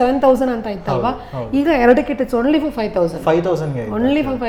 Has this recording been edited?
no; 0 cuts

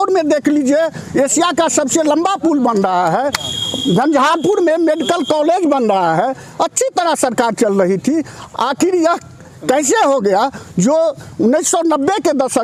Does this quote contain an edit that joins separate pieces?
no; 0 cuts

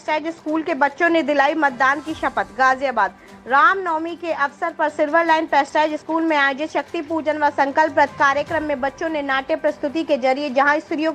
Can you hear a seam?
no; 0 cuts

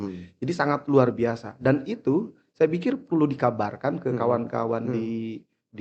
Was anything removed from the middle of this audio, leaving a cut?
no; 0 cuts

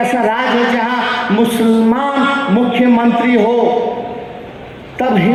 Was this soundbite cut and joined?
no; 0 cuts

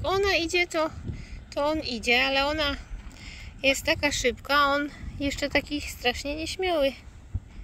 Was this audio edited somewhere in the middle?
no; 0 cuts

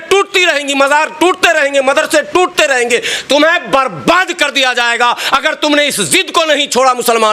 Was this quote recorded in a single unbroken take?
yes; 0 cuts

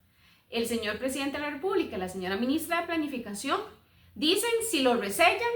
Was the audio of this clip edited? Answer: no; 0 cuts

